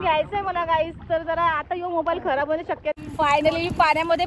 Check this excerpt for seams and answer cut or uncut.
cut